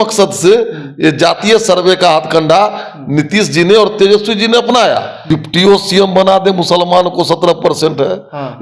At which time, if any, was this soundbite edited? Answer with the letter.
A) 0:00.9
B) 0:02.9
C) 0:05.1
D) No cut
C